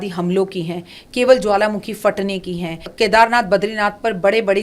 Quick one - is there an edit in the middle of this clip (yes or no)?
yes